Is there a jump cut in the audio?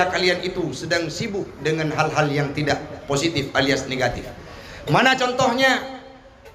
no; 0 cuts

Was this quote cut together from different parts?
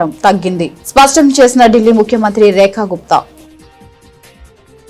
no; 0 cuts

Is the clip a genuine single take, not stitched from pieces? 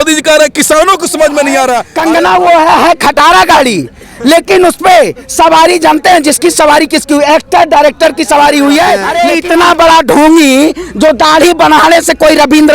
no; 2 cuts; at 1.9 s, 9.1 s

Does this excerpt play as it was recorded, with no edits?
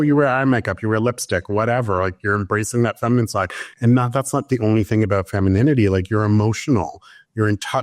yes; 0 cuts

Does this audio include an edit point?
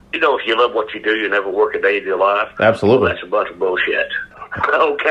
yes; 1 cut; at 4.2 s

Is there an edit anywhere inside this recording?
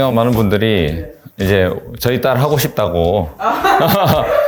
no; 0 cuts

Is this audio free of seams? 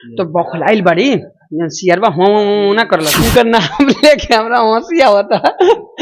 no; 1 cut; at 3.2 s

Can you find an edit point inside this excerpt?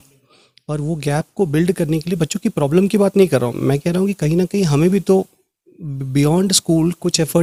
no; 0 cuts

